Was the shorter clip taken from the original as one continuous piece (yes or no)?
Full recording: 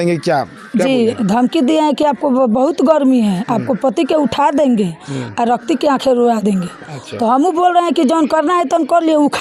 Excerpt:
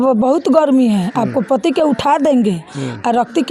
yes